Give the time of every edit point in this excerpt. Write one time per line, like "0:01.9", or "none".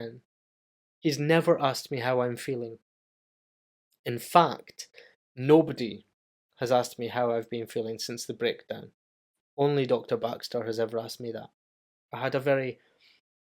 0:12.1